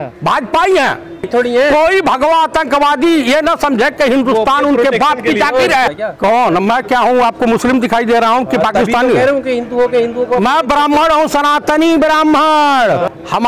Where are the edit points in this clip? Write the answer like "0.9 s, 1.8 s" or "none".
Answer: 1.2 s, 5.9 s